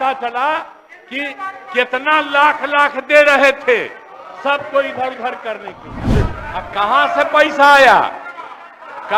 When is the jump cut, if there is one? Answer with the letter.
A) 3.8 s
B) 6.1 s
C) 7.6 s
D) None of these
B